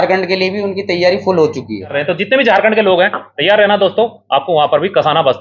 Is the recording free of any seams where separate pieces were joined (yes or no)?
no